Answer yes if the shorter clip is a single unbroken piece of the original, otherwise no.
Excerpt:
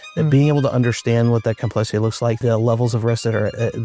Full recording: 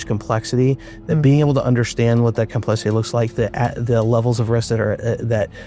no